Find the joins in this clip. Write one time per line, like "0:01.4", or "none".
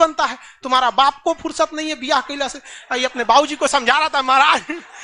none